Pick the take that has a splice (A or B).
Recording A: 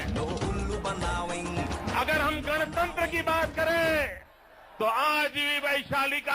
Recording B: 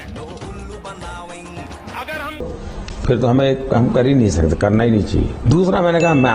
B